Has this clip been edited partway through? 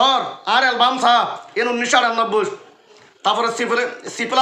no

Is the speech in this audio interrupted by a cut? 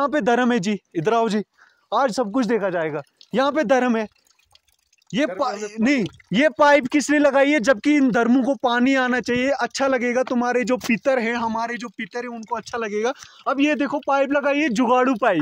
no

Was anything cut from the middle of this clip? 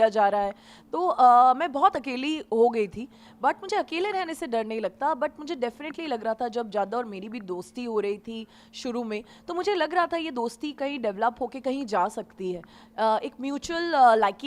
no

